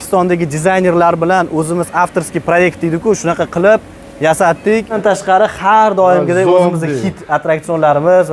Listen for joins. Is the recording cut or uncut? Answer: cut